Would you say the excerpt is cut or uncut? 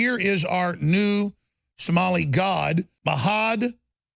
cut